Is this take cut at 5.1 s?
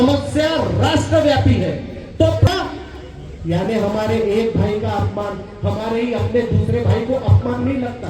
no; 1 cut; at 2.5 s

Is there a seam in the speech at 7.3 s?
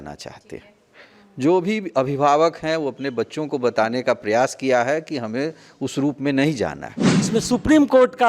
yes; 1 cut; at 7.3 s

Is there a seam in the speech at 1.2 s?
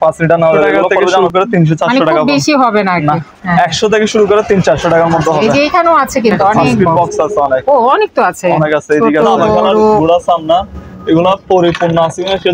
yes; 3 cuts; at 1.2 s, 6.9 s, 10.0 s

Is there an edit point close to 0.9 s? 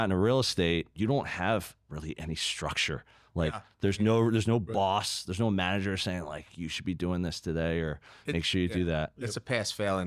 yes; 1 cut; at 0.9 s

